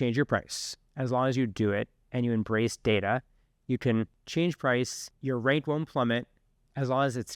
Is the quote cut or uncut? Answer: cut